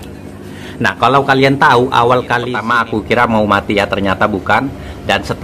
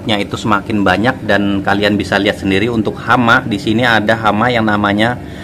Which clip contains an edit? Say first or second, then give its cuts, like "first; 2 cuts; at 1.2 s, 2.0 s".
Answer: first; 1 cut; at 2.6 s